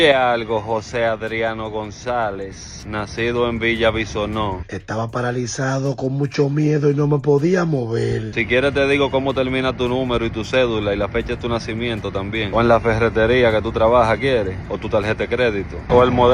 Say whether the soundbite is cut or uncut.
uncut